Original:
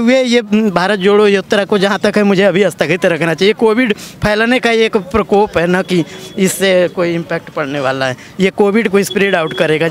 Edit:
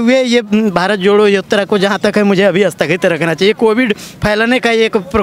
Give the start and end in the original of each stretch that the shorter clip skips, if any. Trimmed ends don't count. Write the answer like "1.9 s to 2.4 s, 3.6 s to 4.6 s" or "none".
none

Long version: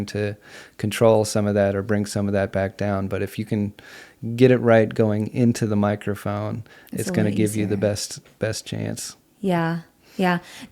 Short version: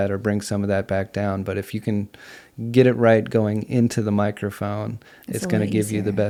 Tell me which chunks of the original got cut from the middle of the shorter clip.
none

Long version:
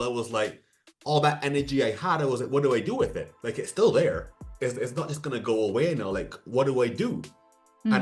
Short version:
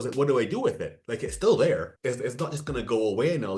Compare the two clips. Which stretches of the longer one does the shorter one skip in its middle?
4.3 s to 4.5 s

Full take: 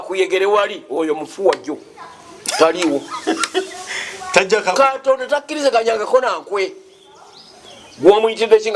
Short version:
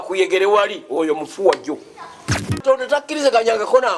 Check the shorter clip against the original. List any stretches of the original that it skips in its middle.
2.5 s to 4.9 s

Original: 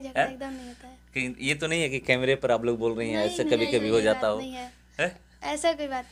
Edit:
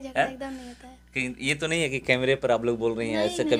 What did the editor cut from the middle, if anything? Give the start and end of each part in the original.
none

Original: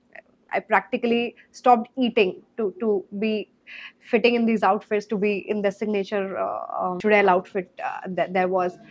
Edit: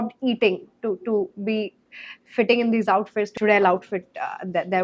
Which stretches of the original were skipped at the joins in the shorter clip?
5.1 s to 7.0 s

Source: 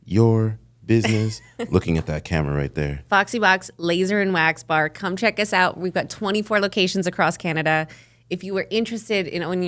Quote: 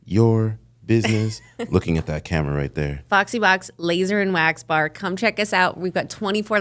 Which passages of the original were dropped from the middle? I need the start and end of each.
none

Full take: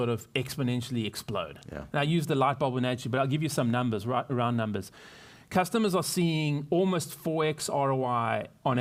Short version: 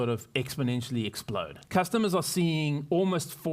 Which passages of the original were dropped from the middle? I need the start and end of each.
1.6 s to 5.4 s

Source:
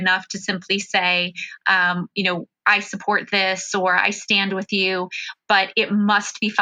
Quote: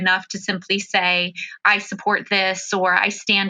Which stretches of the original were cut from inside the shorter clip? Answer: 1.5 s to 2.5 s

